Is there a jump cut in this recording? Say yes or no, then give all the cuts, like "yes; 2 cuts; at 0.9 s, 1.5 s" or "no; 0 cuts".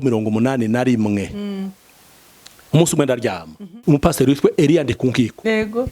yes; 1 cut; at 3.7 s